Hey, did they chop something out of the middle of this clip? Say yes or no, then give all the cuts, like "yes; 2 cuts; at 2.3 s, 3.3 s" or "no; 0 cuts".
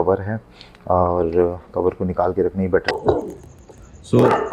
yes; 1 cut; at 2.9 s